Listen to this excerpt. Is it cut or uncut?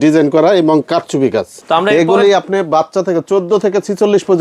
cut